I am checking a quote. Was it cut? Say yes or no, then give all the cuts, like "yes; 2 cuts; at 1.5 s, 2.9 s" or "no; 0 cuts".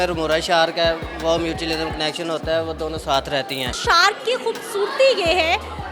yes; 1 cut; at 3.8 s